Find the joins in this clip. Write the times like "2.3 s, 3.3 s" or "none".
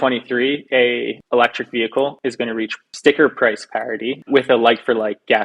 1.2 s, 2.4 s, 4.2 s